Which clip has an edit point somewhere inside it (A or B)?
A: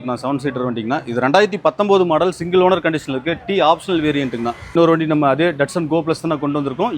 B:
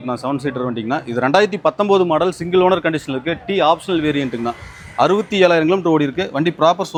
A